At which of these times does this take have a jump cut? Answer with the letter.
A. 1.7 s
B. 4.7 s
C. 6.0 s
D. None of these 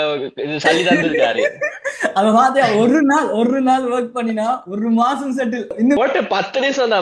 C